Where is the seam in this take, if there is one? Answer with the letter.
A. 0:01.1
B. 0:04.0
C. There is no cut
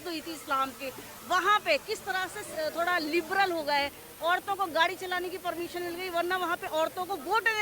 C